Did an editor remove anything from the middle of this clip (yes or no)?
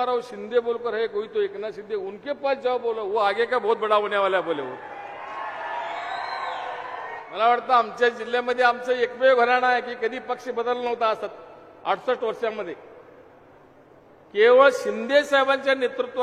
yes